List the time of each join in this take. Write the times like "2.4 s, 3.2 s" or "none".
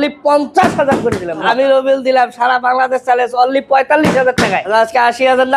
1.4 s, 4.6 s